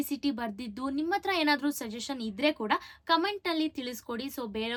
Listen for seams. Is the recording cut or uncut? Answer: uncut